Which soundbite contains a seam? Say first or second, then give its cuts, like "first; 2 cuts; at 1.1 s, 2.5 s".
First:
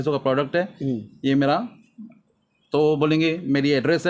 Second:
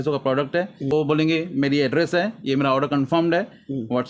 second; 1 cut; at 0.9 s